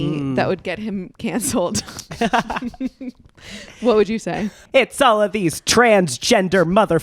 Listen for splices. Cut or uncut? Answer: cut